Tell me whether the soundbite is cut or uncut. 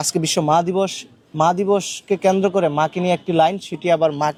uncut